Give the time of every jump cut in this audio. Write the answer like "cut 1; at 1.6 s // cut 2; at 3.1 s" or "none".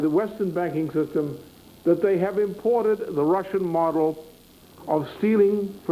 none